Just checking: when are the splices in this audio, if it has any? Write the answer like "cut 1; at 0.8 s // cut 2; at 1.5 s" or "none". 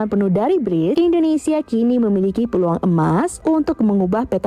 cut 1; at 0.9 s // cut 2; at 3.3 s